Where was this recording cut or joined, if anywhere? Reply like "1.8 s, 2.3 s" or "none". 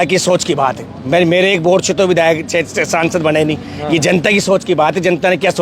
none